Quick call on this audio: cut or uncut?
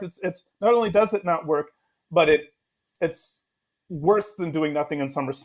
cut